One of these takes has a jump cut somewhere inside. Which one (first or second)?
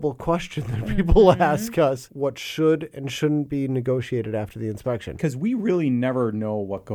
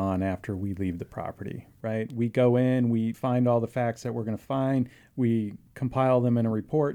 first